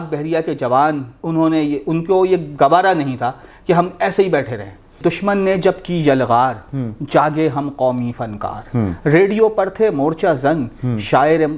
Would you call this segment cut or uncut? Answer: cut